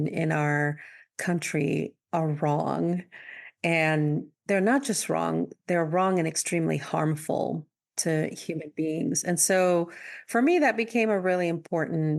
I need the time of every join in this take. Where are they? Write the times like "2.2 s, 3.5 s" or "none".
4.3 s